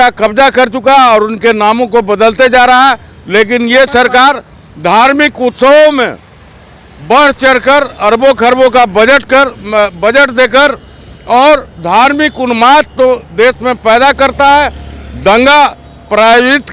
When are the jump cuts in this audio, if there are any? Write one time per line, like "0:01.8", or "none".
none